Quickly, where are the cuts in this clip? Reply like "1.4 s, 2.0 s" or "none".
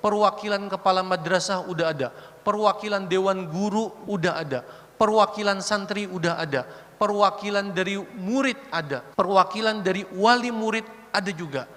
4.0 s, 9.0 s

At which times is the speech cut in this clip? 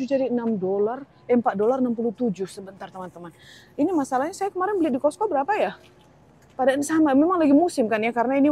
none

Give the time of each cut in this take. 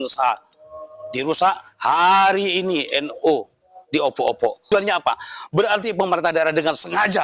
4.7 s

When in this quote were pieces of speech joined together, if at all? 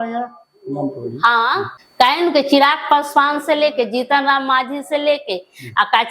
1.8 s

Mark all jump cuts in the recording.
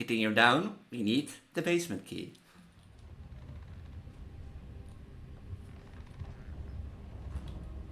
3.0 s

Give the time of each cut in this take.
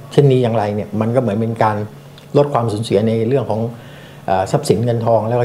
none

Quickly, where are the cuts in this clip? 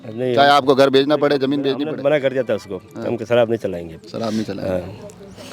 none

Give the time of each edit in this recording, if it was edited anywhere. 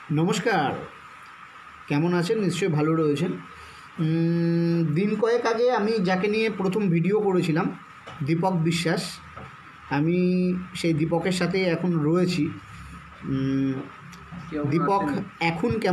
none

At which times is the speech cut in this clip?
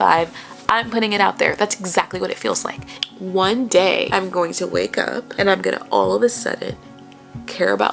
2.8 s, 4.1 s, 5.3 s

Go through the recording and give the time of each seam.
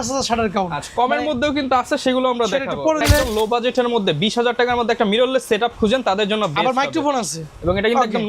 3.0 s

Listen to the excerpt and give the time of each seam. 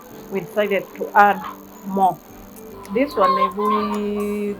2.8 s

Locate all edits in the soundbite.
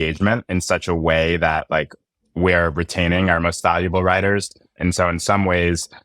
4.6 s

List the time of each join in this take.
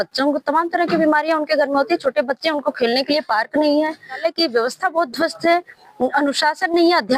4.2 s

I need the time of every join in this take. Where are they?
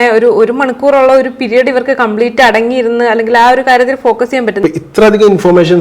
4.5 s

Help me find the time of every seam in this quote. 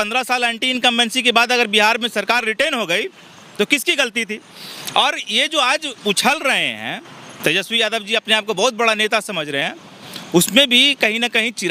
none

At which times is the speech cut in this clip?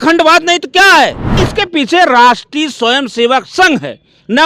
1.2 s

